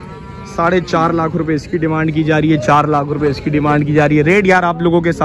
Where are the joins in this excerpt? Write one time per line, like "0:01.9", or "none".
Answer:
none